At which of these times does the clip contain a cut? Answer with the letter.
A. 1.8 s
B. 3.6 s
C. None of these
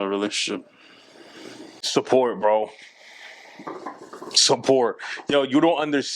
A